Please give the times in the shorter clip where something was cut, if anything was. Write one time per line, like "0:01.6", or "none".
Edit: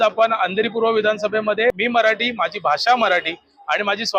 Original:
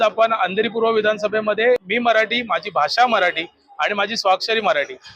0:01.7